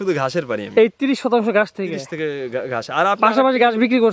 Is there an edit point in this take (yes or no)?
no